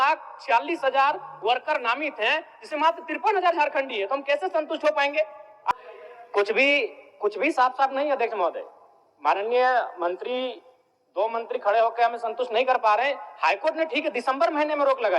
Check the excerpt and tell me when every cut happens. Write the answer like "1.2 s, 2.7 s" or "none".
5.7 s